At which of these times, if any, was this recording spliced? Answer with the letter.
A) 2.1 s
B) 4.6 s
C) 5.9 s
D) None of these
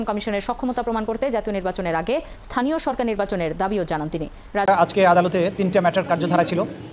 B